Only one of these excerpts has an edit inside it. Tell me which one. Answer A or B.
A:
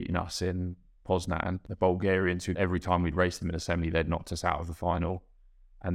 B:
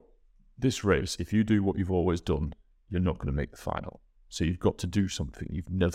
A